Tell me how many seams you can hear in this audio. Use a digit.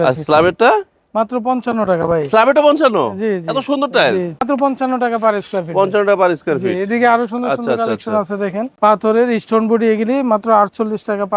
2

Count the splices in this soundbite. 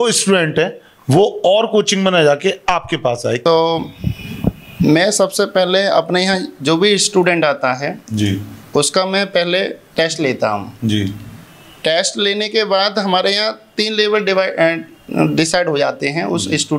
1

